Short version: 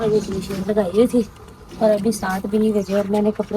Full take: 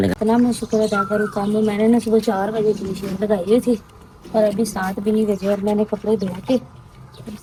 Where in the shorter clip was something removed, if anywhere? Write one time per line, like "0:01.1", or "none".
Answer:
none